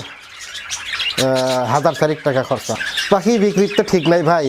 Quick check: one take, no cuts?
no; 1 cut; at 2.8 s

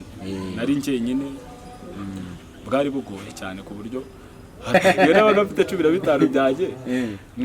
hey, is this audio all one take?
no; 1 cut; at 4.7 s

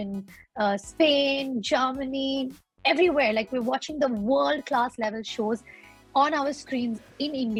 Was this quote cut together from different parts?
no; 0 cuts

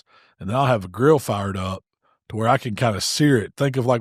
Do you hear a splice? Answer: no; 0 cuts

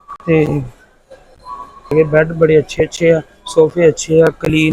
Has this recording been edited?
yes; 1 cut; at 1.9 s

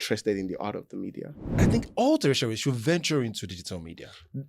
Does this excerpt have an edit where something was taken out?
yes; 1 cut; at 1.5 s

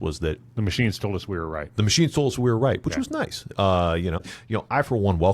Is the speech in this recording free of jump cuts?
no; 1 cut; at 4.2 s

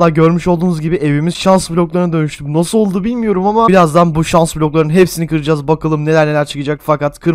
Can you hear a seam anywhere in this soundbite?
no; 0 cuts

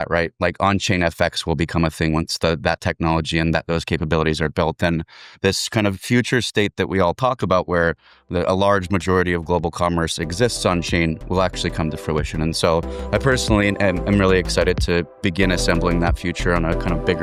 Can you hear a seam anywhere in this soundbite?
no; 0 cuts

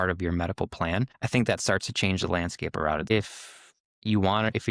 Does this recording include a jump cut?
yes; 2 cuts; at 1.2 s, 3.1 s

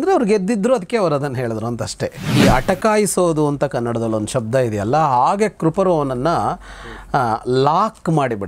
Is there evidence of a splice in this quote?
yes; 1 cut; at 2.3 s

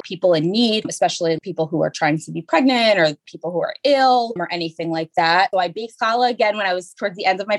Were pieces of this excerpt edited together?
no; 0 cuts

